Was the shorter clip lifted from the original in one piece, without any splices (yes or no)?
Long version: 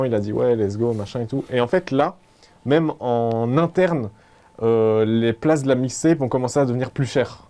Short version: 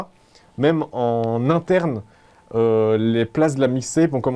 yes